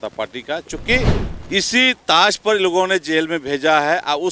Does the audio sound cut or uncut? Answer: cut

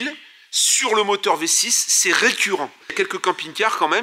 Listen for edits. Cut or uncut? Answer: cut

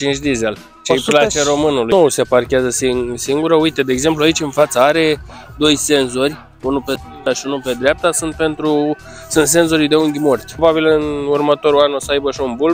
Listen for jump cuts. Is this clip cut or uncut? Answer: cut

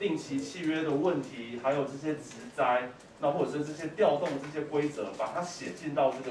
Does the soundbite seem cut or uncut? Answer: uncut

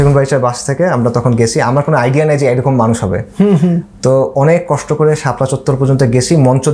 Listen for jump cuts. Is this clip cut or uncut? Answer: uncut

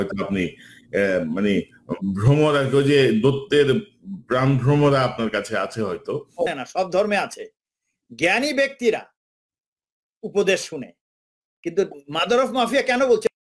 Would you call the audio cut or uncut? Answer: cut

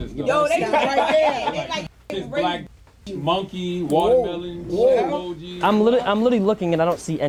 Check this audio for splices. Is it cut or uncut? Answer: uncut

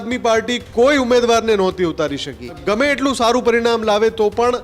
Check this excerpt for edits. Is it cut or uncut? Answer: cut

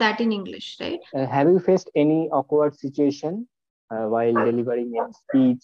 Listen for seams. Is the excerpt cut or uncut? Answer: cut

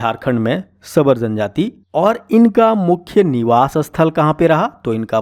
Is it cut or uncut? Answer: uncut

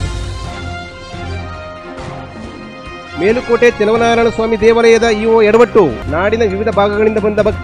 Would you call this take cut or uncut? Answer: uncut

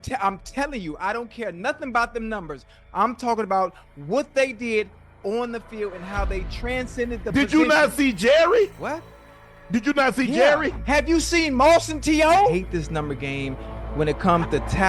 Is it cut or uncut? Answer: cut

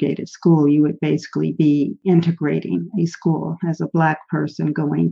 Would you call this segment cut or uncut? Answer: uncut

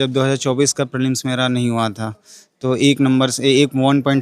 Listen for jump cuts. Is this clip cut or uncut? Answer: uncut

